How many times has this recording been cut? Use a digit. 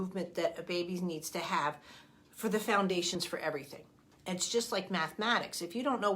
1